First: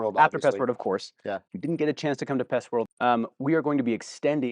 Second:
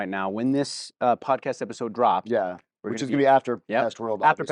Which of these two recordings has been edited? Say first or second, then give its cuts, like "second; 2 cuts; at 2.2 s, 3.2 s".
first; 2 cuts; at 1.5 s, 2.9 s